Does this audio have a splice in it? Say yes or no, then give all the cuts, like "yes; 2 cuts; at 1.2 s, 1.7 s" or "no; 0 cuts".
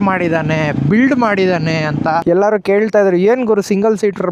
yes; 1 cut; at 2.2 s